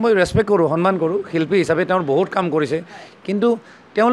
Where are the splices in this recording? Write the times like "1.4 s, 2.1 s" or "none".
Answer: none